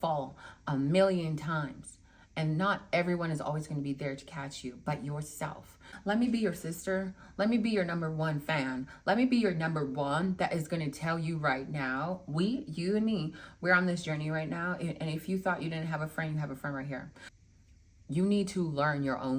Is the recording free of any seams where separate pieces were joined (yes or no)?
no